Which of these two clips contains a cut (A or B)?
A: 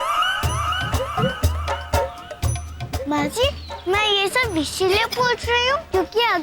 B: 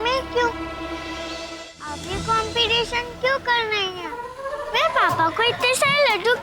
B